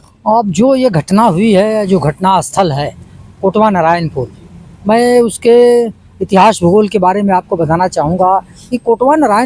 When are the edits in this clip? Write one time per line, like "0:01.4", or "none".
none